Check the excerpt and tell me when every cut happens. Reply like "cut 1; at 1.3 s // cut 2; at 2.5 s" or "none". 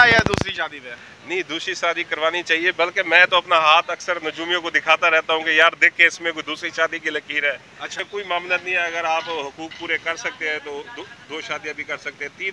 cut 1; at 7.9 s